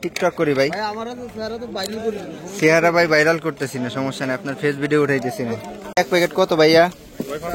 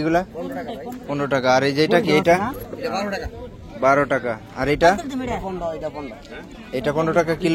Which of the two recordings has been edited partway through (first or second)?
first